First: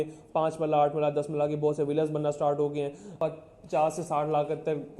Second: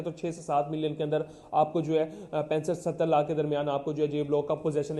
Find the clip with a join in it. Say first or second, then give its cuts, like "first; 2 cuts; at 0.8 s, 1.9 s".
first; 1 cut; at 3.1 s